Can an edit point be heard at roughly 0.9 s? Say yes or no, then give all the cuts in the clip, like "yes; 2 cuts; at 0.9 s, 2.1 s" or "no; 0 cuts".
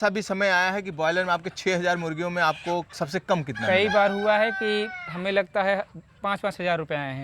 no; 0 cuts